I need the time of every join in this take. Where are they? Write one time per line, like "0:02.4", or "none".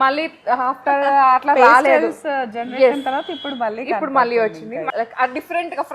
0:04.9